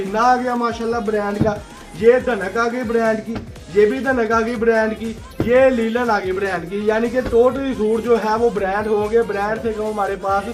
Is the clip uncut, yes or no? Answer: yes